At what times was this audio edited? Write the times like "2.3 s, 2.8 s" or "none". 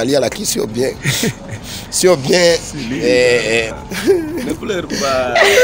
3.8 s